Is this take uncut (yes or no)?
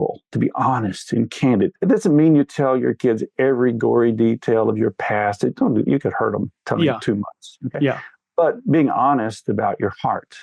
yes